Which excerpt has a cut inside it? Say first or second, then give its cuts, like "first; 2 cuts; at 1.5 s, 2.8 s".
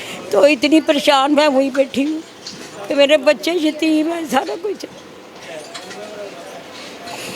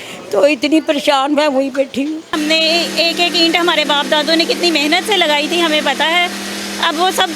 second; 1 cut; at 2.3 s